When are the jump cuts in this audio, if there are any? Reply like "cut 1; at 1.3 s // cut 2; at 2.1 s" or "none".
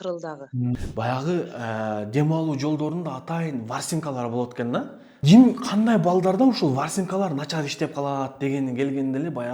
cut 1; at 0.8 s // cut 2; at 5.1 s